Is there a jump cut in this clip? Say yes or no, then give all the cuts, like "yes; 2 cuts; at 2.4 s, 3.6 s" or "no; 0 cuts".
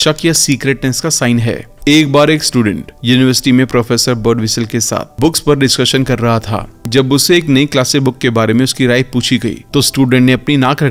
no; 0 cuts